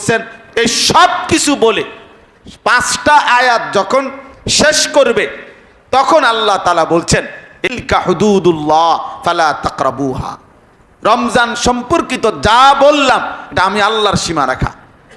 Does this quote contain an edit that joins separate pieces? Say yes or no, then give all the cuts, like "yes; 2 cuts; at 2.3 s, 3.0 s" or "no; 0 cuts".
yes; 1 cut; at 7.8 s